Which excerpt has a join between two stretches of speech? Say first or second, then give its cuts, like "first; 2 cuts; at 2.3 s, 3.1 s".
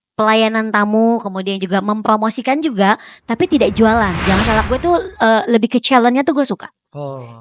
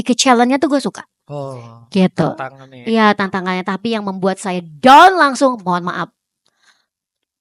first; 1 cut; at 4.6 s